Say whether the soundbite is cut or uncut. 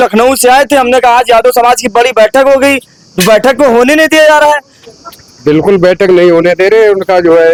uncut